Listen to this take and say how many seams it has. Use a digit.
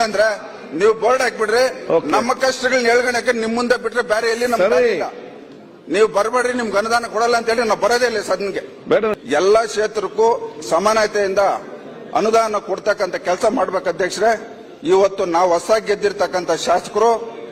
1